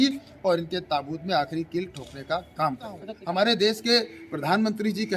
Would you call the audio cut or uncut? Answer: cut